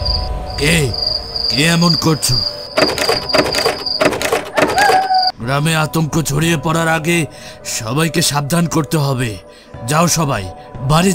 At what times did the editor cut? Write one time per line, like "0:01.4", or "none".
0:02.5
0:05.3